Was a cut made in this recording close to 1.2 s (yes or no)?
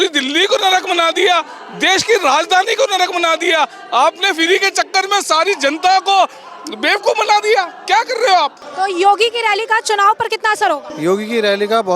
no